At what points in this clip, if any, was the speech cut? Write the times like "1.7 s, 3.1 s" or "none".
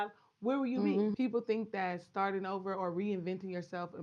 1.1 s

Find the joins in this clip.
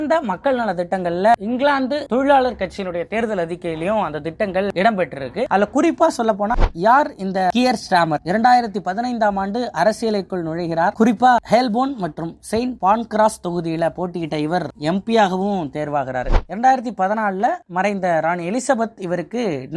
6.5 s, 16.4 s

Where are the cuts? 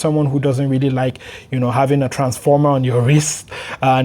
none

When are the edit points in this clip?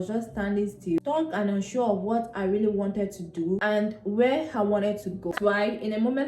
5.3 s

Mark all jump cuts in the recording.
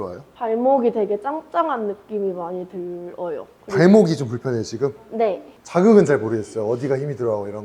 none

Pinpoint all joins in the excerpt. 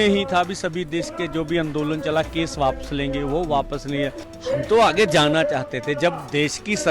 4.3 s

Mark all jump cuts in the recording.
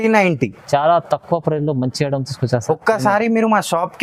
none

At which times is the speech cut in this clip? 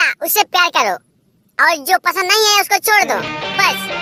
none

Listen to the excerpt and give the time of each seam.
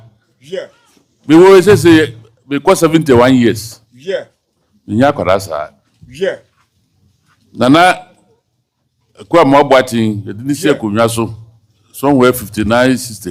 none

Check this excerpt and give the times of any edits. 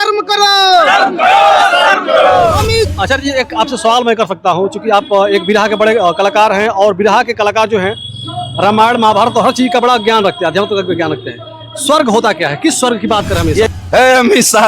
2.9 s, 13.7 s

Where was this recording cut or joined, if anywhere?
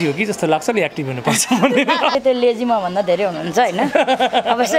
2.1 s

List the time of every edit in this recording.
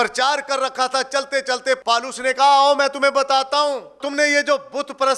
1.8 s, 3.9 s

